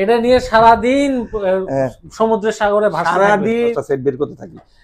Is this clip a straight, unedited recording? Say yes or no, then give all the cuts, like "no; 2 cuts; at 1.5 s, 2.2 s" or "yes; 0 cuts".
no; 1 cut; at 3.8 s